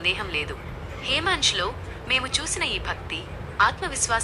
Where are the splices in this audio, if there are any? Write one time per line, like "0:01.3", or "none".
none